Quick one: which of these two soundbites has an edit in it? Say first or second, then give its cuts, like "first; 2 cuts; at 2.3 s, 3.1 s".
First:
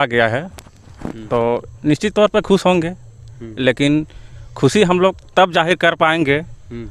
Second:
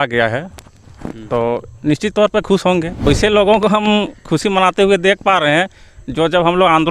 second; 1 cut; at 3.0 s